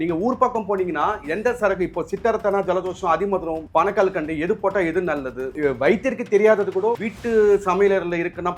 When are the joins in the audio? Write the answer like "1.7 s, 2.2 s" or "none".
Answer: 3.6 s, 5.5 s, 7.1 s